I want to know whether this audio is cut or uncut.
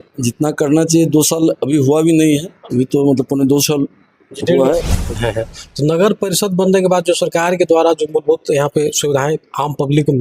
cut